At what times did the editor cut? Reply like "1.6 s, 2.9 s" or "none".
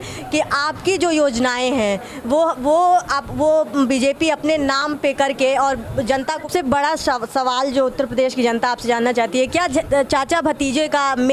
6.5 s